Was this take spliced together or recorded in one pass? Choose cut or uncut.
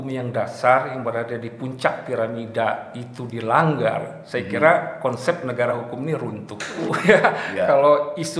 cut